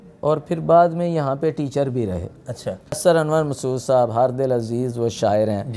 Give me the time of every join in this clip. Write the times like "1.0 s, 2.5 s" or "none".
3.0 s